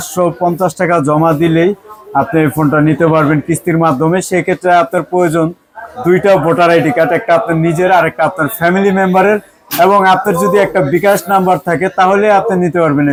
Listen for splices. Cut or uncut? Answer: uncut